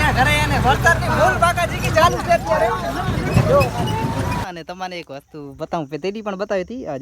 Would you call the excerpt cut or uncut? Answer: cut